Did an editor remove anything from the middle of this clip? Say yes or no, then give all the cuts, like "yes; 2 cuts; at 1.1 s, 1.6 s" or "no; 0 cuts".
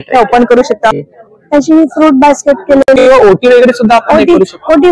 yes; 1 cut; at 1.0 s